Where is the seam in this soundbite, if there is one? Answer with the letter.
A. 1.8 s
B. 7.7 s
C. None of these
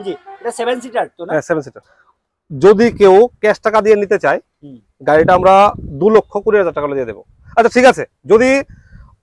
A